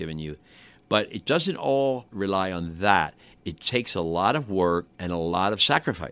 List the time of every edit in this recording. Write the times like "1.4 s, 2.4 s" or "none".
0.8 s, 2.1 s, 4.9 s